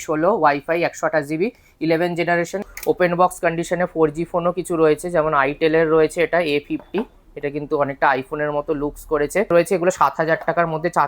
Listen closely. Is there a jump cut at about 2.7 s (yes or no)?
yes